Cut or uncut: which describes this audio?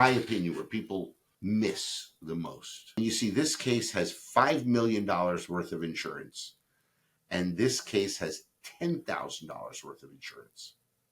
cut